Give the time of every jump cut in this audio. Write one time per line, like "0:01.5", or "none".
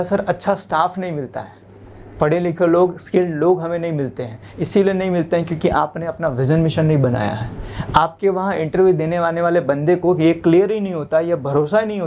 none

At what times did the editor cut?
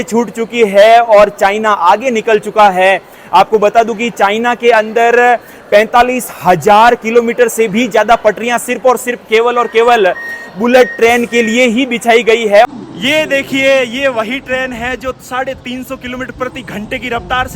0:12.7

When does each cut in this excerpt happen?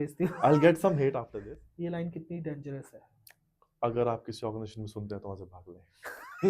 0:01.3

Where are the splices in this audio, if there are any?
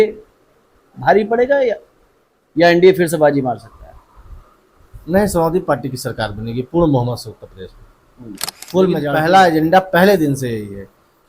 0:09.1

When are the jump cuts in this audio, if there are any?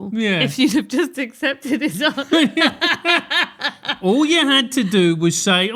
none

